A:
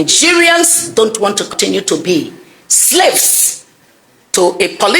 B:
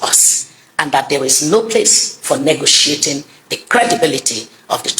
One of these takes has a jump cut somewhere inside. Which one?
A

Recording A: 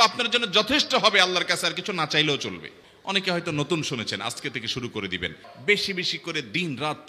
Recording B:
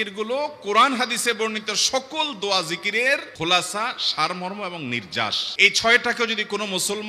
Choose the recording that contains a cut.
A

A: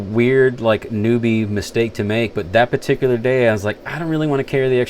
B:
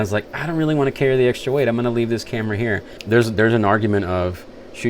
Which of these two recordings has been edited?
B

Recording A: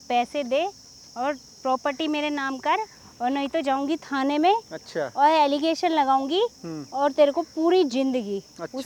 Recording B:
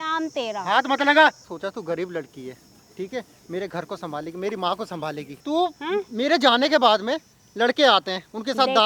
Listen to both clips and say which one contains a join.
B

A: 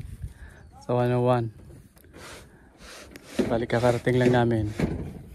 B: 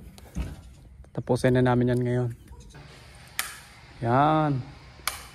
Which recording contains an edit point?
B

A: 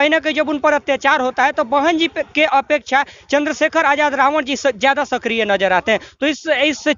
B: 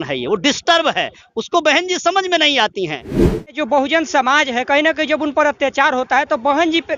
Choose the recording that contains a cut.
B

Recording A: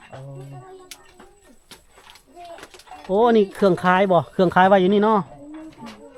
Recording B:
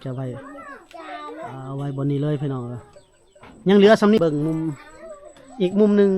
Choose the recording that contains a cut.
B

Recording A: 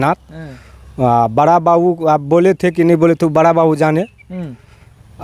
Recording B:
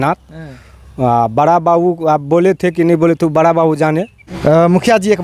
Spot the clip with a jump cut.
B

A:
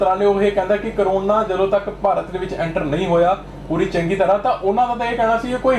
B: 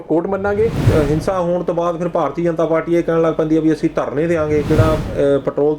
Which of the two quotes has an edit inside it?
B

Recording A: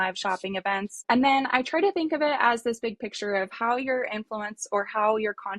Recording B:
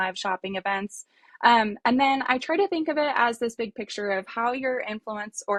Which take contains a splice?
A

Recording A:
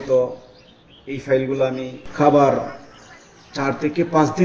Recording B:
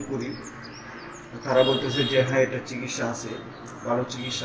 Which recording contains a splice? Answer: A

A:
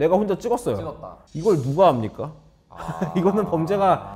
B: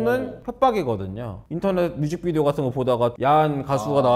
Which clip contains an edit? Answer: B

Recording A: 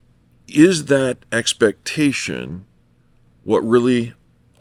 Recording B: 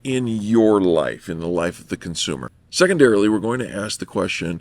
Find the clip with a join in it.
B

